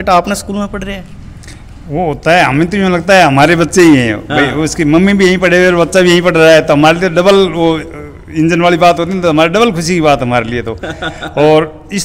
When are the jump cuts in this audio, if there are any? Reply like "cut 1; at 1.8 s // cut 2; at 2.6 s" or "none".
none

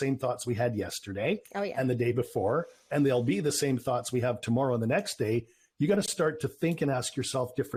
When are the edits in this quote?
none

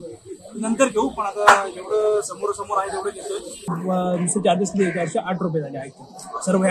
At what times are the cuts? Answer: cut 1; at 3.8 s

